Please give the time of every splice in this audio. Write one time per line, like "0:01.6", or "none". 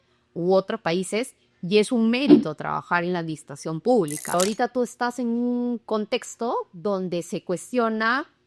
0:04.3